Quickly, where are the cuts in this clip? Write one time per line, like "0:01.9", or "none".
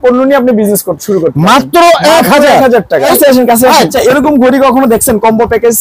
0:03.1
0:03.9